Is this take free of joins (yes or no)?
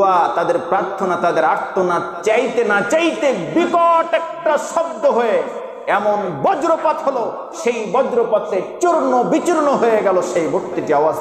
yes